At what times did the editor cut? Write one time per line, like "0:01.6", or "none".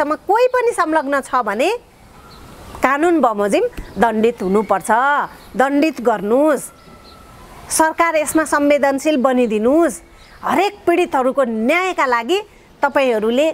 none